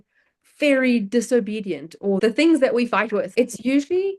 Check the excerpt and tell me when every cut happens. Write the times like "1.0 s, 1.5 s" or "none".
2.2 s, 3.3 s